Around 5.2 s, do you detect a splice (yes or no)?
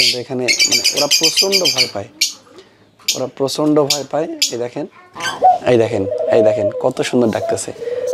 yes